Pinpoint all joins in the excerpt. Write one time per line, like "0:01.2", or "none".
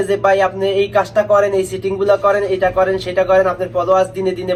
none